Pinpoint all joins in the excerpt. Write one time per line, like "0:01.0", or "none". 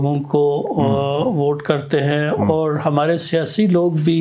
none